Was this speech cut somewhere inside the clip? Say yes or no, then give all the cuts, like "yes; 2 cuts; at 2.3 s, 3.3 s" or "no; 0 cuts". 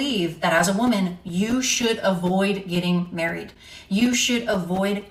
no; 0 cuts